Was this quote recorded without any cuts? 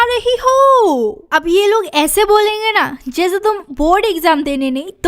yes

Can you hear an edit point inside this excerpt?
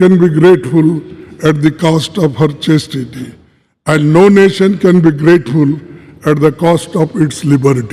no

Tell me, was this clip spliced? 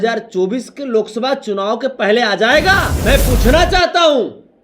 yes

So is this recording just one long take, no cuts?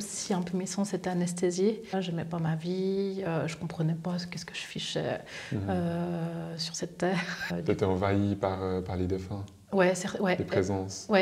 no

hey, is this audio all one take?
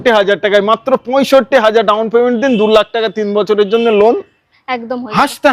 yes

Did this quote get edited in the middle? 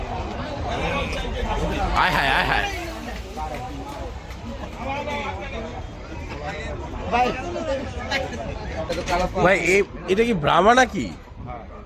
yes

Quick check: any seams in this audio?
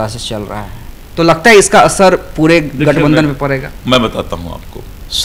no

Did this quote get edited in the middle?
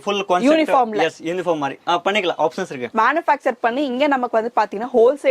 yes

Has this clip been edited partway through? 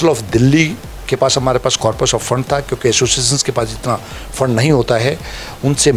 no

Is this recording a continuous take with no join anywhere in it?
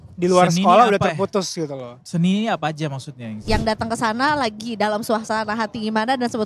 no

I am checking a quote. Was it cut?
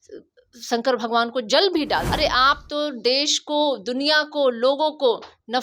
yes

